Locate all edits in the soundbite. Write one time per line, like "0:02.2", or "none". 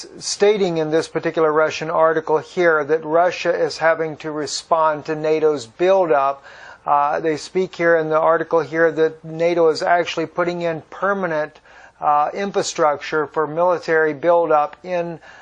0:09.7

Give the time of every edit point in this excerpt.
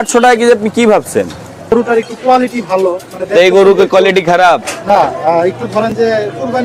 0:01.7

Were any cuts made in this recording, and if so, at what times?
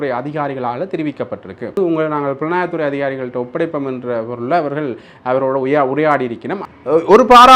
0:01.8
0:06.6

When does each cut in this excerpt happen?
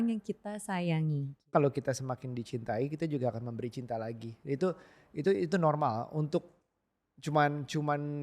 0:01.5

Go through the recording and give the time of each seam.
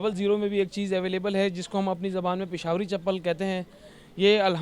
none

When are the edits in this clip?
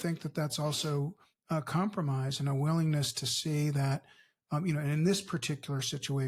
none

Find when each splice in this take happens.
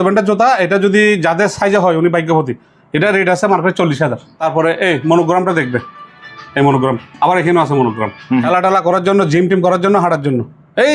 0:04.3
0:08.5

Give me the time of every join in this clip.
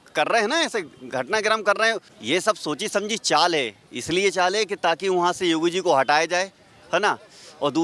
0:02.1

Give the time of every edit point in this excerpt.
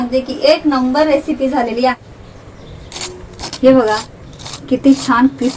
0:02.0

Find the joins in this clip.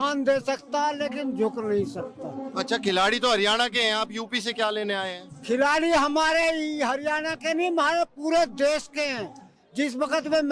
none

